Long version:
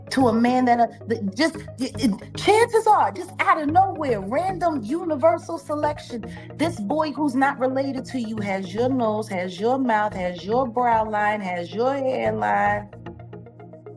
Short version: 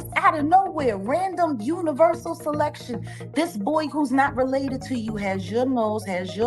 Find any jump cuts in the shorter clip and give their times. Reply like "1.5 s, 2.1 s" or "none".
none